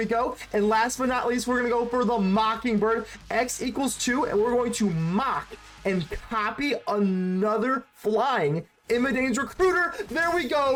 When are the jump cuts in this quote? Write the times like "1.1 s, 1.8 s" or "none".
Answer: none